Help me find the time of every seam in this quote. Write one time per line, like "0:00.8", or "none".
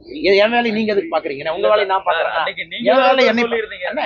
none